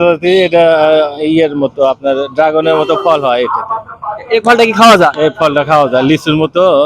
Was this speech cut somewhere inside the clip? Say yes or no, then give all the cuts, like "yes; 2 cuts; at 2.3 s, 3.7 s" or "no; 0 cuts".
no; 0 cuts